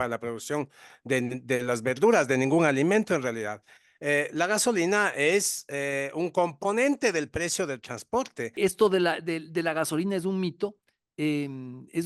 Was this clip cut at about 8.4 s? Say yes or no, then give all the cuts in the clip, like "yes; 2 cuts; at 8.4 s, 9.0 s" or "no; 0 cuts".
yes; 1 cut; at 8.4 s